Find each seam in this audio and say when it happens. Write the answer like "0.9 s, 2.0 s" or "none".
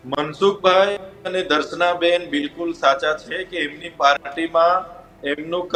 none